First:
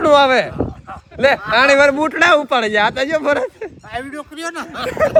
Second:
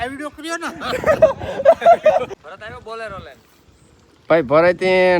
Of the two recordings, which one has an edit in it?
second; 1 cut; at 2.3 s

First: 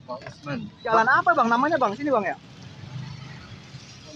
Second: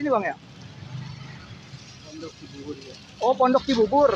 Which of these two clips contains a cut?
first; 1 cut; at 0.9 s

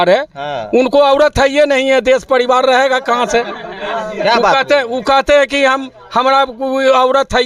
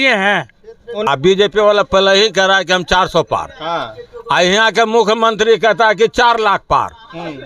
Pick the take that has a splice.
second; 1 cut; at 1.1 s

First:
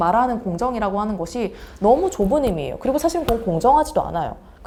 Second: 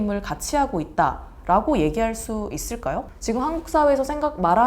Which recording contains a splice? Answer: second; 1 cut; at 3.1 s

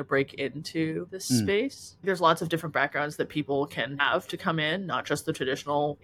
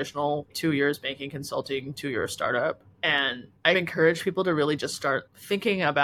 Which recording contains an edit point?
first; 3 cuts; at 1.1 s, 2.0 s, 3.9 s

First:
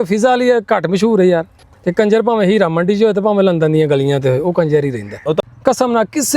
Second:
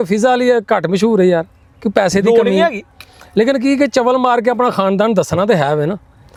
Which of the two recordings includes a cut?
first; 2 cuts; at 1.7 s, 5.4 s

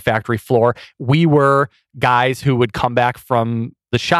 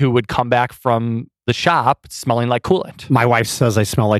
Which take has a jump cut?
second; 1 cut; at 2.9 s

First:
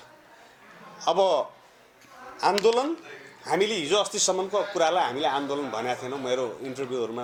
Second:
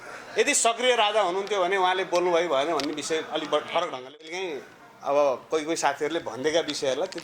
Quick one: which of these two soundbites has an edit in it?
second; 1 cut; at 4.3 s

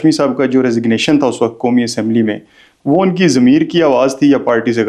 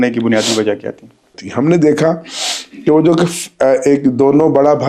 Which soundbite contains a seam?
second; 1 cut; at 1.4 s

